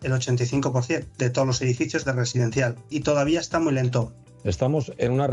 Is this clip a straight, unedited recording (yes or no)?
no